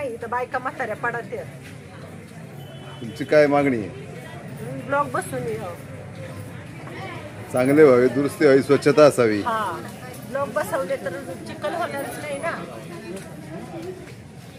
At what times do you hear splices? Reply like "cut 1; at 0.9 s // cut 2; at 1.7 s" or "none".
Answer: none